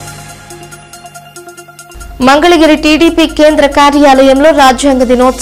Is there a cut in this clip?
yes; 1 cut; at 1.5 s

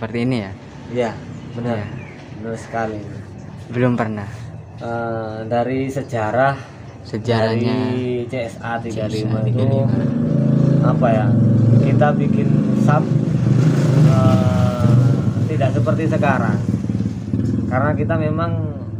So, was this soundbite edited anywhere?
no; 0 cuts

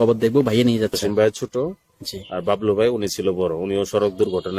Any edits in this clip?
yes; 1 cut; at 1.0 s

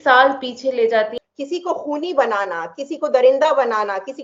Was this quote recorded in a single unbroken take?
no; 1 cut; at 1.2 s

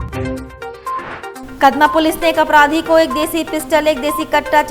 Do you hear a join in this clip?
no; 0 cuts

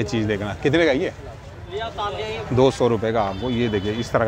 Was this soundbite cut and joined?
no; 0 cuts

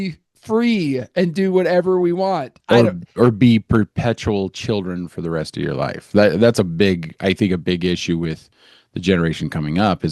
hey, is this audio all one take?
yes; 0 cuts

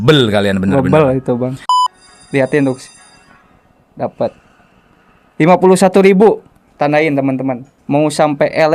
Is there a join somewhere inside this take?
yes; 1 cut; at 1.6 s

